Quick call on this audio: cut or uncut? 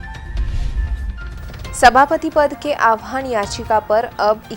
uncut